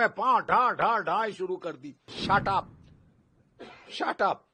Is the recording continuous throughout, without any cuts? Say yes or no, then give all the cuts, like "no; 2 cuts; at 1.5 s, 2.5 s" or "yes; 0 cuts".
no; 1 cut; at 2.1 s